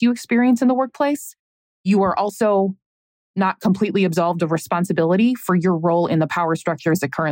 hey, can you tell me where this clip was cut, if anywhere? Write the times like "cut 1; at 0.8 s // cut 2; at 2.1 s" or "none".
none